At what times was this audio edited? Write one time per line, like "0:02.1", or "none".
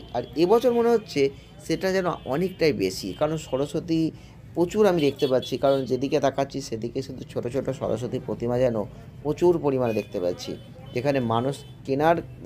none